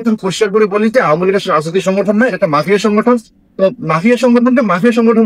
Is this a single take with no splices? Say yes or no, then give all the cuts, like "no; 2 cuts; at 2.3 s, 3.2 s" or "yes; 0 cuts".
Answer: yes; 0 cuts